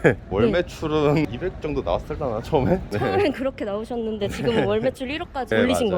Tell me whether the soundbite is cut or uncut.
cut